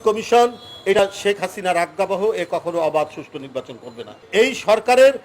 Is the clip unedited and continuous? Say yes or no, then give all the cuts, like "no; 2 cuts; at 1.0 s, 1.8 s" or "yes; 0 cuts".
no; 2 cuts; at 1.0 s, 4.2 s